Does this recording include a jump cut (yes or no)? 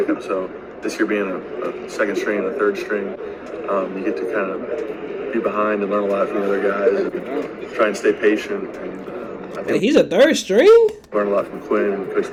no